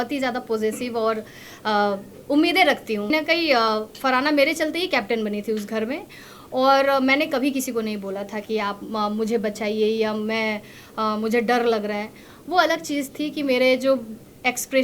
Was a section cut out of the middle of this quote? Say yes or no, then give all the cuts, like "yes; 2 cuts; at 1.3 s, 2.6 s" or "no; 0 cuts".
yes; 1 cut; at 3.1 s